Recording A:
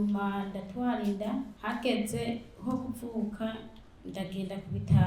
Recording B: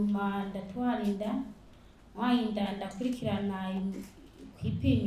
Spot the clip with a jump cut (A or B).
A